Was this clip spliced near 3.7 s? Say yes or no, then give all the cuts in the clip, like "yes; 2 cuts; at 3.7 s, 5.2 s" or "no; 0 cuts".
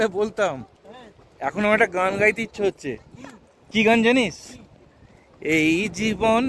yes; 1 cut; at 3.7 s